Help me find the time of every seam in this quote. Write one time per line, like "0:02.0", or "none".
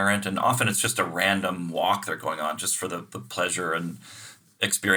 none